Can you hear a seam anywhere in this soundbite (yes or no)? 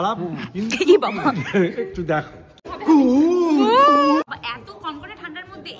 yes